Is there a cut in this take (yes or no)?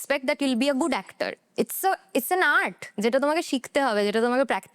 no